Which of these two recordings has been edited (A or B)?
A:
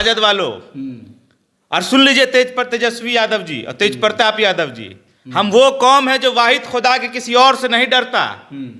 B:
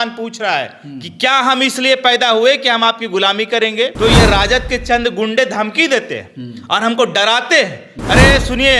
B